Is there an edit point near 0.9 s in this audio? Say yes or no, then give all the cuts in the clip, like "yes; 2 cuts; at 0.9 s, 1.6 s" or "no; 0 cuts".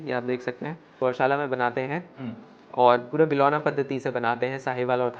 yes; 1 cut; at 0.9 s